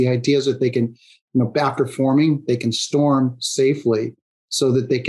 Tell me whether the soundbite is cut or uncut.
uncut